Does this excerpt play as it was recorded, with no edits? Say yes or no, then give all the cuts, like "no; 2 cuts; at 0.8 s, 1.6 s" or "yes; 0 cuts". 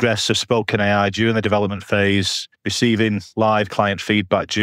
yes; 0 cuts